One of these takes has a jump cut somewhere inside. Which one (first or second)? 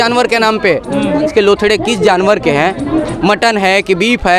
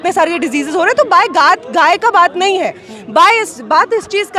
first